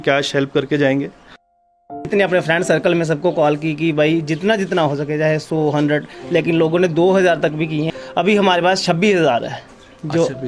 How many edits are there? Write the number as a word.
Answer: two